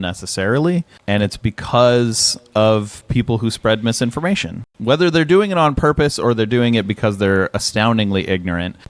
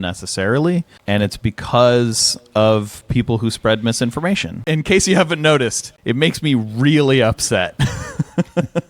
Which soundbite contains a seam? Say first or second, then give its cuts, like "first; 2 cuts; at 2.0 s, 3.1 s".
second; 1 cut; at 4.7 s